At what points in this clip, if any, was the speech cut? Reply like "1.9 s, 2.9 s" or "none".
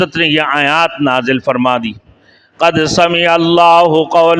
none